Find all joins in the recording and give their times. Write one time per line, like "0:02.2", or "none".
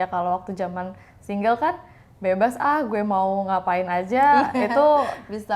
none